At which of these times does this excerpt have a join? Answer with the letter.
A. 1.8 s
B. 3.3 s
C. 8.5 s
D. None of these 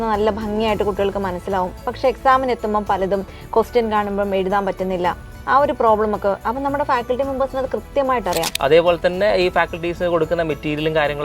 C